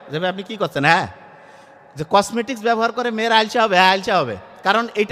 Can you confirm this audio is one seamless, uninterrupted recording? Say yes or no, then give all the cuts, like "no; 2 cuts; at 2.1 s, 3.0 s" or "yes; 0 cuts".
yes; 0 cuts